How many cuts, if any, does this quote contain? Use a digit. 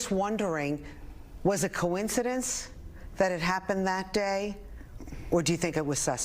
1